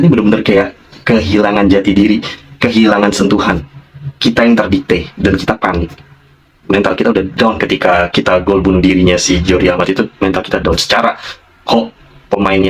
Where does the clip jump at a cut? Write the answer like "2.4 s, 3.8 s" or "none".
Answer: none